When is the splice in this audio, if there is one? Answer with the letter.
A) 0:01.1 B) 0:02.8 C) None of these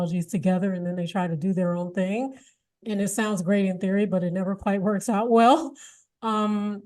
B